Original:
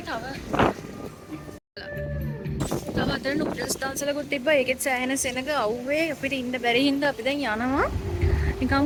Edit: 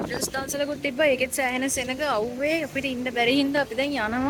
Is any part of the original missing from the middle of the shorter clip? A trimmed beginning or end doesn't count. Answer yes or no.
no